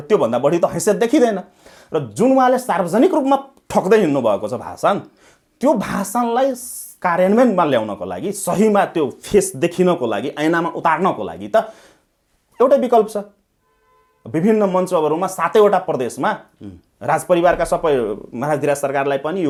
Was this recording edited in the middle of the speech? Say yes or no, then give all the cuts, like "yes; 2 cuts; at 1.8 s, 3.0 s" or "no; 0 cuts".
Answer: no; 0 cuts